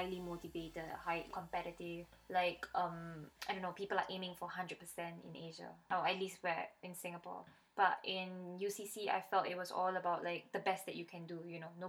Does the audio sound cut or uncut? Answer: uncut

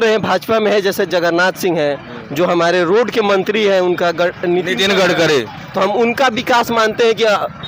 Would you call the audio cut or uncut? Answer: uncut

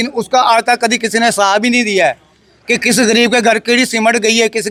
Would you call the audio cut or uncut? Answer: uncut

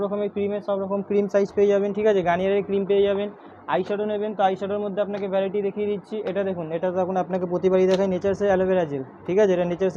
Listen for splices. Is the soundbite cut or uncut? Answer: uncut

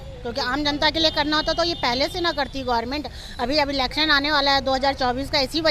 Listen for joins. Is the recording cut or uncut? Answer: uncut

